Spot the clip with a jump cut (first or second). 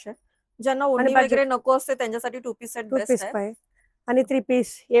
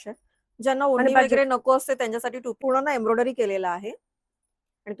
second